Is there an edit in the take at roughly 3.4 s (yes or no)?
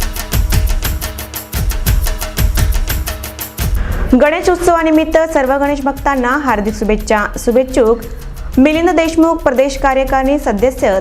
no